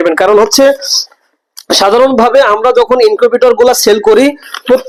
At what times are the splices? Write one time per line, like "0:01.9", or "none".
none